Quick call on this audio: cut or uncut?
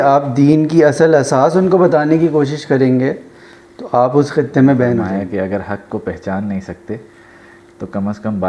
cut